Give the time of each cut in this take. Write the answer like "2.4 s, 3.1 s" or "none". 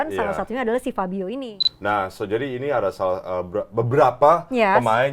1.4 s